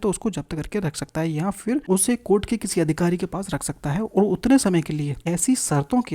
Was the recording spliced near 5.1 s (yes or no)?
yes